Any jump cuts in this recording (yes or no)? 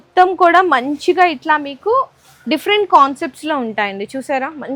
no